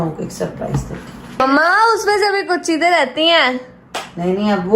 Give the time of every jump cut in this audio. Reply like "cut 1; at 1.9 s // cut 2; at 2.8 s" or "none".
cut 1; at 1.4 s